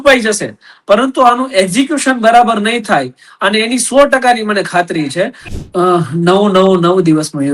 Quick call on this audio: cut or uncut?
cut